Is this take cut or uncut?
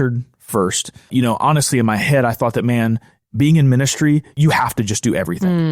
cut